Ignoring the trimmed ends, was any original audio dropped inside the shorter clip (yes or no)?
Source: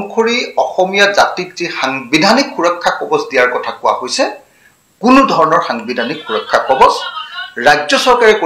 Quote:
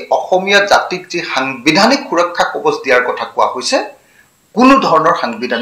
no